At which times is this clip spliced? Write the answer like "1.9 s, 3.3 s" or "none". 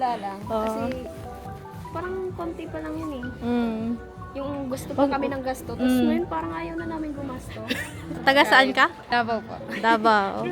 8.2 s, 9.0 s